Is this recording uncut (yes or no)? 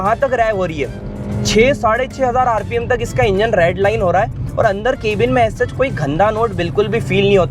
yes